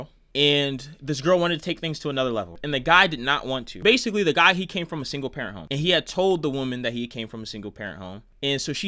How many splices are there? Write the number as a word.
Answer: two